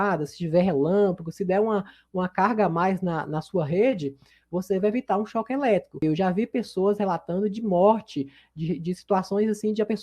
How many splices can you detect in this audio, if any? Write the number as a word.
one